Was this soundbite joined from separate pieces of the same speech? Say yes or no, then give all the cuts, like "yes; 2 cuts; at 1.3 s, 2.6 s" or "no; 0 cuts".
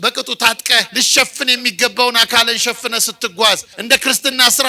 yes; 2 cuts; at 0.9 s, 3.7 s